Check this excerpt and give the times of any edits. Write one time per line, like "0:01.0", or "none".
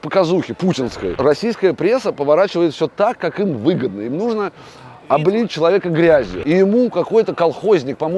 0:01.1
0:06.3